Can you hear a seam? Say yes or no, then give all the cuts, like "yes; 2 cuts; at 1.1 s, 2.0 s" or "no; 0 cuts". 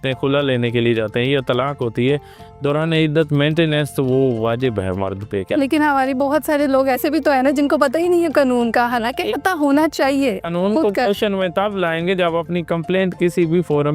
yes; 2 cuts; at 5.5 s, 10.5 s